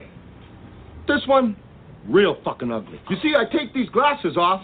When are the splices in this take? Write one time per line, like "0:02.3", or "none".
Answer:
0:03.0